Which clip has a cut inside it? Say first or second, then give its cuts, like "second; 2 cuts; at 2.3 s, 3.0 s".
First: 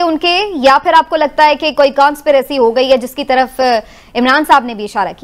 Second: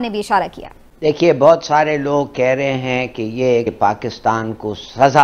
second; 1 cut; at 3.6 s